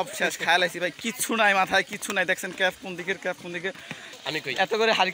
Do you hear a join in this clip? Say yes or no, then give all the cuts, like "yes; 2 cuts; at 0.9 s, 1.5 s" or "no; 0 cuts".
yes; 1 cut; at 4.2 s